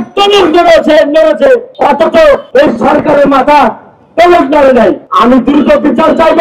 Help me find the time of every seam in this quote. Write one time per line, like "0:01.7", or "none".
0:01.7
0:02.4
0:05.1